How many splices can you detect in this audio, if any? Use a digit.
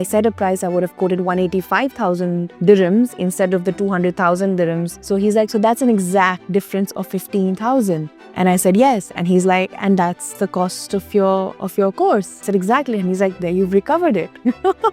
5